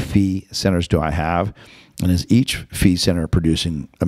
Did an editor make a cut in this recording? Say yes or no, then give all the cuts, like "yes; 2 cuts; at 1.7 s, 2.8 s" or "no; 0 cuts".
no; 0 cuts